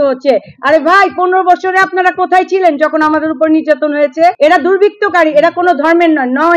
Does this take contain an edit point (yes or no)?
yes